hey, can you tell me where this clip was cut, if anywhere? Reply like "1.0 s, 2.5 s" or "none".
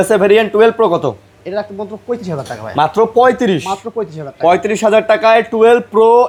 none